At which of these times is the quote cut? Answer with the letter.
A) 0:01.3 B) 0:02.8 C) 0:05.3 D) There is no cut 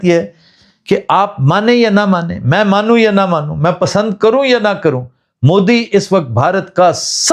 D